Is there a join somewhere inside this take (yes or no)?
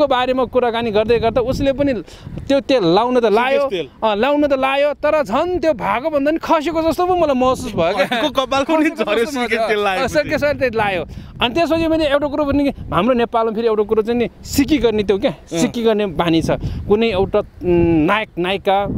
no